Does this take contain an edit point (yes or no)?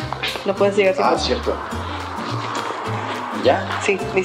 no